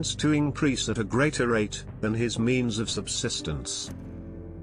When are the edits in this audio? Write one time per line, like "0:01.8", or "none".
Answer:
0:03.6